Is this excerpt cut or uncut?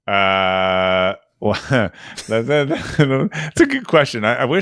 uncut